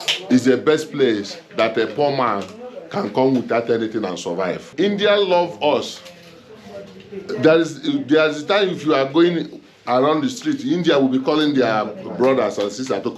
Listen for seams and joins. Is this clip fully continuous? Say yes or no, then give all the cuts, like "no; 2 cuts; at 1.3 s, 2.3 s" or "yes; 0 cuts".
no; 1 cut; at 4.7 s